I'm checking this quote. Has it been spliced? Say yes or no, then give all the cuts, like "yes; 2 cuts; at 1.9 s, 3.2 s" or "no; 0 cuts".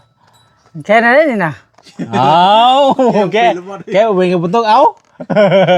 no; 0 cuts